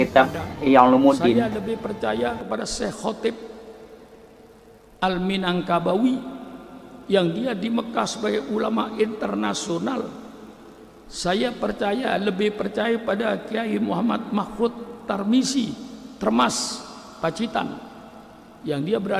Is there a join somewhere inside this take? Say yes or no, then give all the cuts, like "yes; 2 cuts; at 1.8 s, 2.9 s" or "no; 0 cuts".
yes; 1 cut; at 1.4 s